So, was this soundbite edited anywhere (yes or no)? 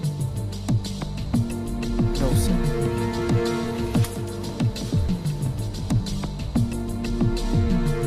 yes